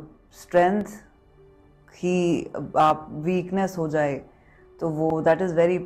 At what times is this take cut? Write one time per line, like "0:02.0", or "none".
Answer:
none